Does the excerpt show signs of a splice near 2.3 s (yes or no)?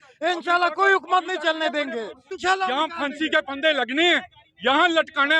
yes